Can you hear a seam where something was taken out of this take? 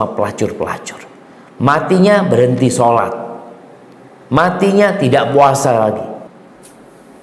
yes; 1 cut; at 6.3 s

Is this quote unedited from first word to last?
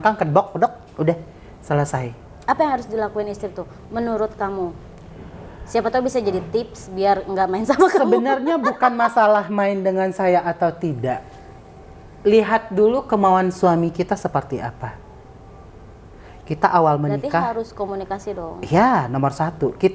yes; 0 cuts

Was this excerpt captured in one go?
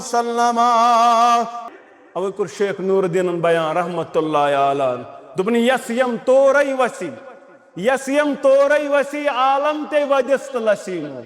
no; 1 cut; at 1.6 s

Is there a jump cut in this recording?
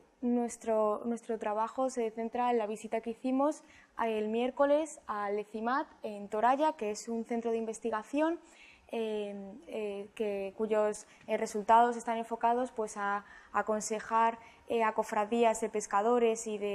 no; 0 cuts

